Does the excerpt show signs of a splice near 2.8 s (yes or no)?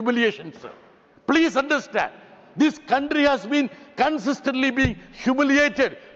no